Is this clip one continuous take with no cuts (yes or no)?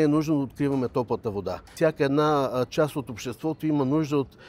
no